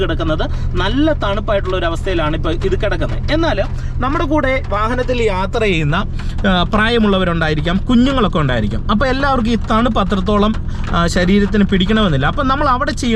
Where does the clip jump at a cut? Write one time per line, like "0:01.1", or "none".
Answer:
none